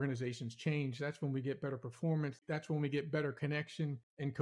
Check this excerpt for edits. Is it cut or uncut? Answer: cut